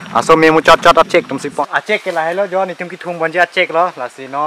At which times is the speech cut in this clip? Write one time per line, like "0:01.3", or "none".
0:01.4